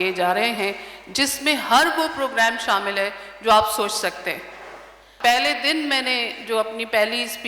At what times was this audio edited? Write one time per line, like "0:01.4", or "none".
0:05.1